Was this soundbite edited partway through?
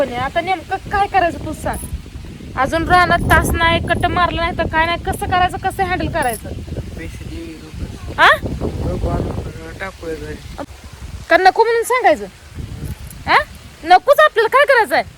yes; 1 cut; at 10.7 s

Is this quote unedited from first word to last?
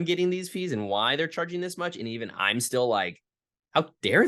yes; 0 cuts

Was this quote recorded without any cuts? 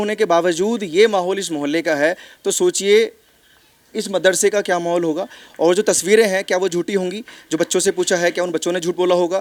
yes; 0 cuts

